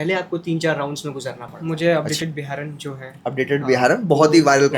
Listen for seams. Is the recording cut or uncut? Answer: cut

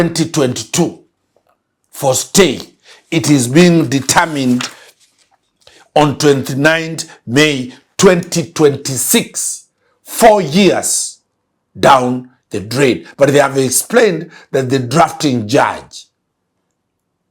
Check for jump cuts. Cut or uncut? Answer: uncut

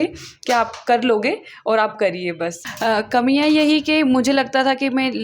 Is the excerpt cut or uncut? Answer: cut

